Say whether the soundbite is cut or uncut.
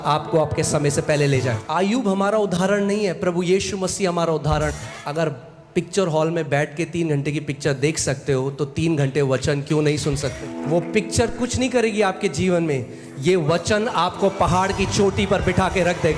cut